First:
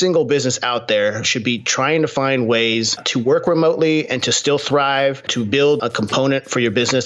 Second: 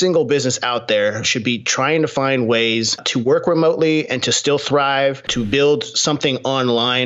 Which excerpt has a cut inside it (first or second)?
first